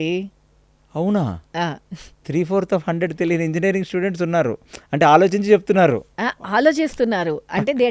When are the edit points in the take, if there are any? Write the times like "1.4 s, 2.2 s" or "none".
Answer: 1.4 s